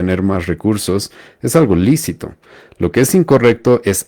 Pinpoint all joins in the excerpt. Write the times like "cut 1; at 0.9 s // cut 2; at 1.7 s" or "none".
none